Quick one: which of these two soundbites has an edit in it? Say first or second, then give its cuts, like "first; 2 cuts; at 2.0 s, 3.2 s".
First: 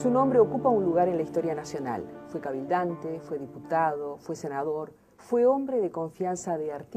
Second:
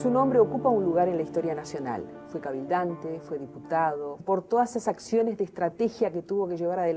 first; 1 cut; at 4.2 s